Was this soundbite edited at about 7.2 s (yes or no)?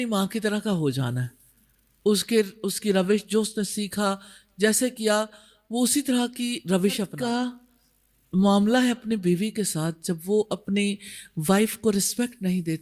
yes